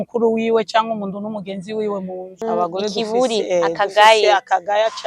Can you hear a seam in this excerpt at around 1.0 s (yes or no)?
no